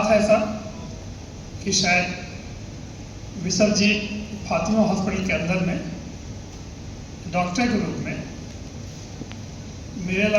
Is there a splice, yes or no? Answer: no